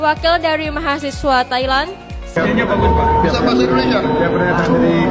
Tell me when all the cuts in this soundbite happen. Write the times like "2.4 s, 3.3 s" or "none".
2.3 s